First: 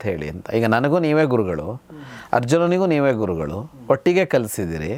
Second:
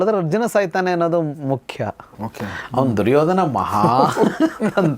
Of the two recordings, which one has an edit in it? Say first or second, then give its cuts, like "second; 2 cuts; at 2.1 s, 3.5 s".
second; 1 cut; at 2.0 s